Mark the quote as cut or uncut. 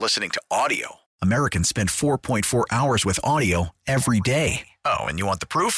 uncut